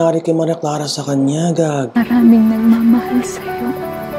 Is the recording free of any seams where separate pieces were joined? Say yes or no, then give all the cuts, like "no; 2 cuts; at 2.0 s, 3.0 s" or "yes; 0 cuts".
no; 1 cut; at 2.0 s